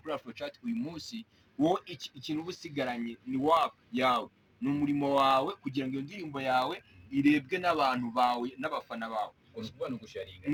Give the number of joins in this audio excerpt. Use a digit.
0